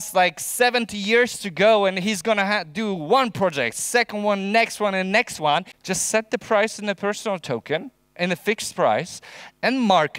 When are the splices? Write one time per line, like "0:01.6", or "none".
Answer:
0:05.8